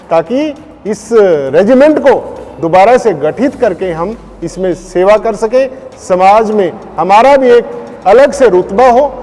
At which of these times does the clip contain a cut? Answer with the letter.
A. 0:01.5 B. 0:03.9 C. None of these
C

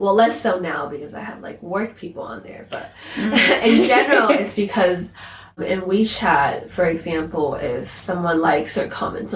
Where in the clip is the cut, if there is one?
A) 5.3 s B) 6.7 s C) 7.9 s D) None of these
D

